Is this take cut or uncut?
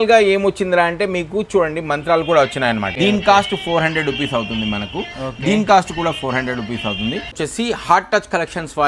cut